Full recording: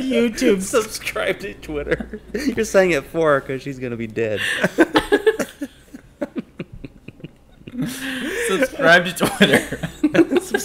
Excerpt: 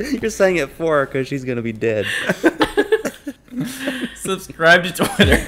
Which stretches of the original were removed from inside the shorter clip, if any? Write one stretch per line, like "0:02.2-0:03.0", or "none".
0:06.9-0:08.8